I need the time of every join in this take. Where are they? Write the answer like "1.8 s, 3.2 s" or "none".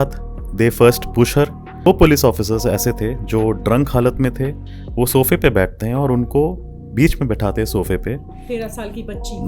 1.9 s